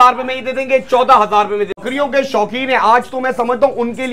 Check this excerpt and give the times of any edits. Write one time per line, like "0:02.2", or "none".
0:01.7